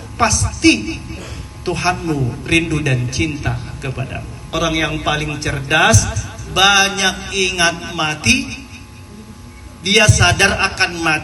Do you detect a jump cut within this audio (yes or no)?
yes